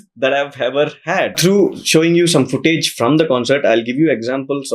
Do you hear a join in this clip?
yes; 1 cut; at 1.3 s

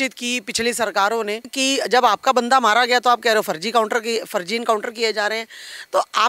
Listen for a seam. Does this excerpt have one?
yes; 1 cut; at 1.5 s

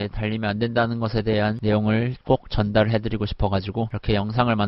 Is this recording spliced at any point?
no; 0 cuts

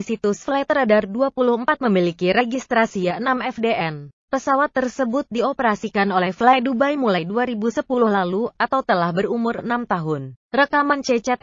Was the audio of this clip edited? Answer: yes; 1 cut; at 6.7 s

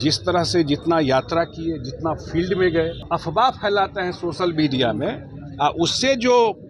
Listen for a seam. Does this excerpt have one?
yes; 1 cut; at 3.0 s

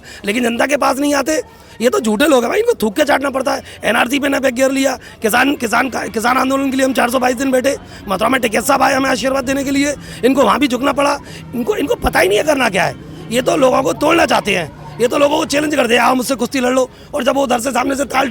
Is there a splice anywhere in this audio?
no; 0 cuts

